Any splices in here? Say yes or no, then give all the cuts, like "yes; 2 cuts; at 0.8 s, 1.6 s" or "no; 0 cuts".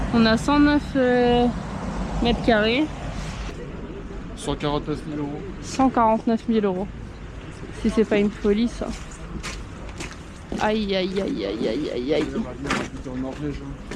no; 0 cuts